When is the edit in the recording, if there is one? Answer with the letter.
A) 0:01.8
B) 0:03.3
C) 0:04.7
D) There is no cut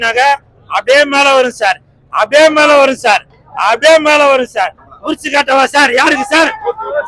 C